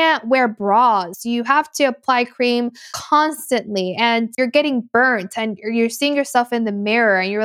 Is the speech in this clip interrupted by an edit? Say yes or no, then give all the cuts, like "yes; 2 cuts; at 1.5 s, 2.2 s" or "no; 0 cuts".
yes; 3 cuts; at 1.1 s, 2.9 s, 4.3 s